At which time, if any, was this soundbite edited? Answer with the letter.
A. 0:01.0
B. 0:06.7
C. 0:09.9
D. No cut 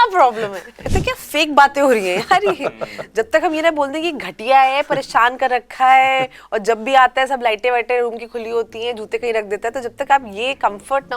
A